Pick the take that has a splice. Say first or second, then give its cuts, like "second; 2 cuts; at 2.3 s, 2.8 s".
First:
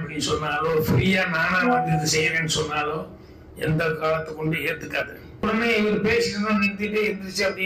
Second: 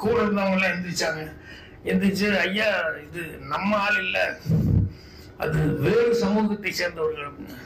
first; 1 cut; at 5.4 s